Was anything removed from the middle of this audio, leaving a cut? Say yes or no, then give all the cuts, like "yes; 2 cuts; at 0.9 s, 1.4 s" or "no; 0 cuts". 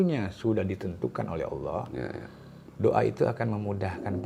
no; 0 cuts